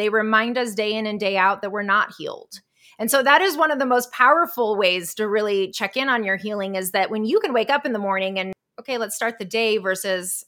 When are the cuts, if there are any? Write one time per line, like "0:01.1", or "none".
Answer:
0:08.5